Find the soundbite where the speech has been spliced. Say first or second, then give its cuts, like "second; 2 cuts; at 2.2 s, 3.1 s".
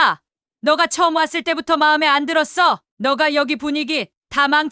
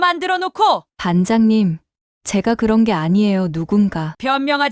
second; 1 cut; at 0.9 s